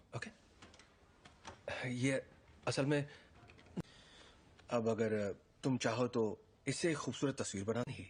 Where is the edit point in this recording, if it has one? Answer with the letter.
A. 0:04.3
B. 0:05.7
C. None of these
C